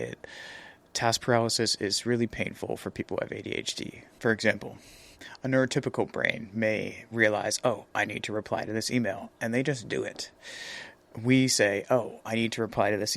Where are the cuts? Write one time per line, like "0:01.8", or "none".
0:04.0